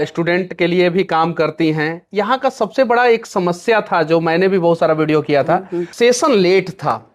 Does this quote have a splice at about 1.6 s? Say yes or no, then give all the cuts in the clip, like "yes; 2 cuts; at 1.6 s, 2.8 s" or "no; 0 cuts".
no; 1 cut; at 5.9 s